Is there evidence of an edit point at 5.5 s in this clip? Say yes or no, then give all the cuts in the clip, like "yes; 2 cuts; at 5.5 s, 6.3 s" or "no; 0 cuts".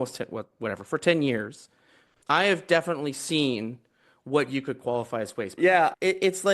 yes; 1 cut; at 5.5 s